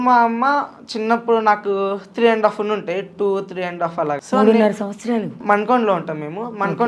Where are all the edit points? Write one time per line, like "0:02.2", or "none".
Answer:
0:04.2
0:05.4